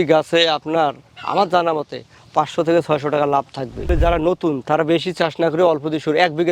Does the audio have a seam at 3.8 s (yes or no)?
yes